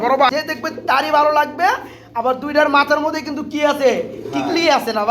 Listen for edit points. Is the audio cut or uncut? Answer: cut